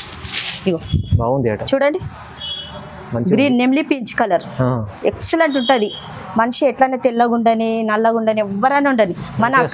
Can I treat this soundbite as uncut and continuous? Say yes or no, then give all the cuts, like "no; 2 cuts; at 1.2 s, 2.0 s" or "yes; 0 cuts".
yes; 0 cuts